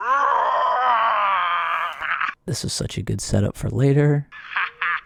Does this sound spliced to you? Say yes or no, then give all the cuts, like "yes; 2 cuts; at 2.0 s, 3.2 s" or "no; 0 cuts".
no; 0 cuts